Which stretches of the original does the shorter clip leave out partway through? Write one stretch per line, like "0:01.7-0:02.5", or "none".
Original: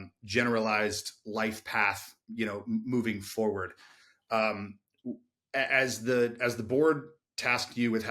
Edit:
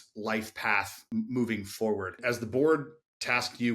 0:02.1-0:02.6
0:03.8-0:06.4